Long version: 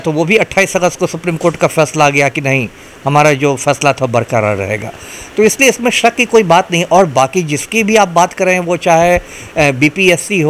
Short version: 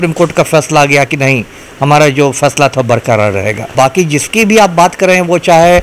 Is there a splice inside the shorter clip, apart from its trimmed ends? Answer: yes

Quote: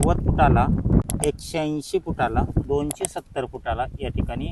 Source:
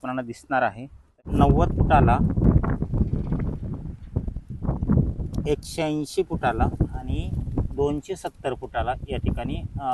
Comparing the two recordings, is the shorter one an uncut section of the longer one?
no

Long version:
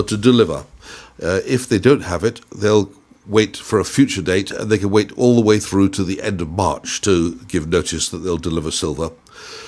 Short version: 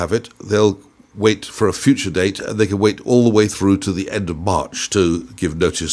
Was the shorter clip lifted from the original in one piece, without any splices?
yes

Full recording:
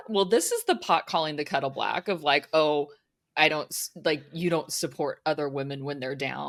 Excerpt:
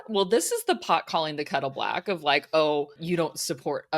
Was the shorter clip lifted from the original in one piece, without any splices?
no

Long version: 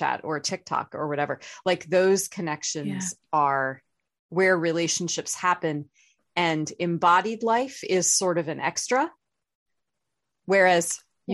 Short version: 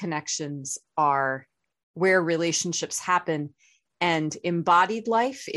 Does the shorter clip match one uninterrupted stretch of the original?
yes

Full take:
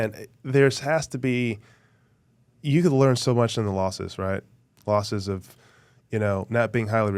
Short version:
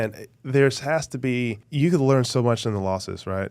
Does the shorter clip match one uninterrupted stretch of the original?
no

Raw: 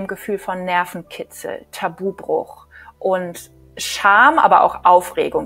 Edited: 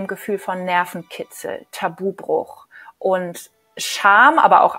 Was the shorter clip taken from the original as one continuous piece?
yes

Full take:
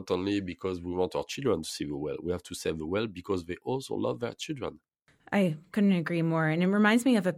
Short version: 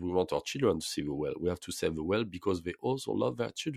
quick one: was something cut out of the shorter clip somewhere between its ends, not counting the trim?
no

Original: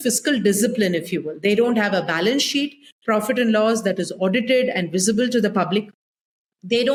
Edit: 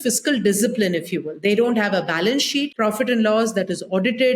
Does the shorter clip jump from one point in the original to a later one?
yes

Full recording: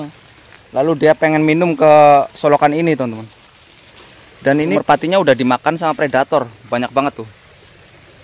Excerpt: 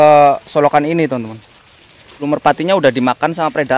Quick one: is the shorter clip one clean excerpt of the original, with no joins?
no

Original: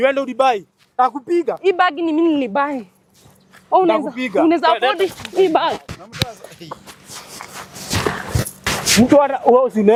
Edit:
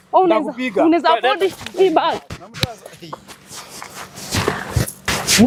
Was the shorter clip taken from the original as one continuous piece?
yes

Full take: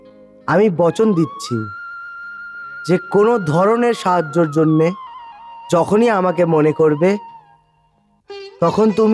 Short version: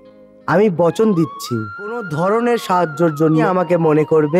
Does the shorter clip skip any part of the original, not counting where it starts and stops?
yes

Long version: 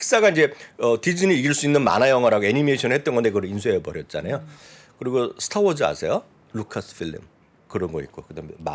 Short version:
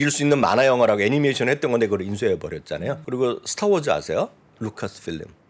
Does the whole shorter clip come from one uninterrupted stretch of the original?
no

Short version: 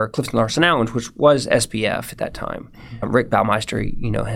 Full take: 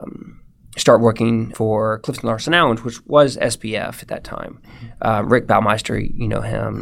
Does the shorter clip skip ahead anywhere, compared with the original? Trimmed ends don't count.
yes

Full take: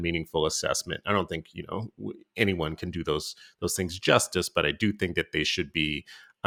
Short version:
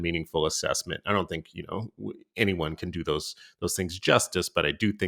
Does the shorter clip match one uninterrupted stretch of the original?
yes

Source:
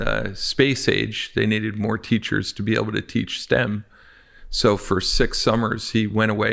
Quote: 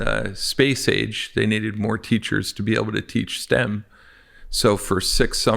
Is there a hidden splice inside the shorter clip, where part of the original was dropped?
no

